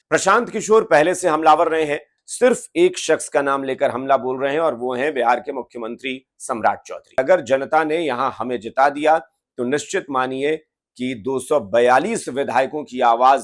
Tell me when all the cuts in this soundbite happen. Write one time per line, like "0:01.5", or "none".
0:02.2
0:07.2